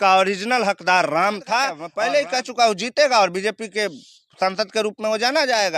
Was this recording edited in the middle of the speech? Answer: yes; 1 cut; at 1.8 s

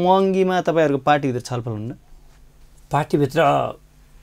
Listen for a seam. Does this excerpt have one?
no; 0 cuts

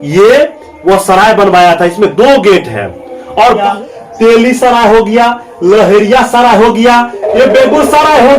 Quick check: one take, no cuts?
no; 1 cut; at 3.6 s

